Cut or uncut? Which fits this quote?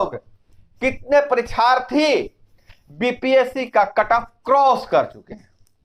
uncut